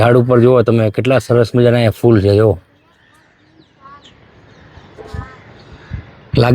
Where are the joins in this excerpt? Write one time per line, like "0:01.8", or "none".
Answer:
none